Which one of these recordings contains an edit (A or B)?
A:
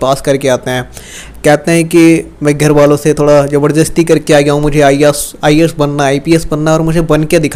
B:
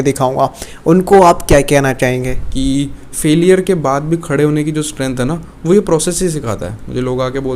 B